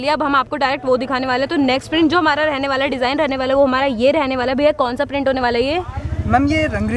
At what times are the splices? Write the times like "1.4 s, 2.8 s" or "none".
none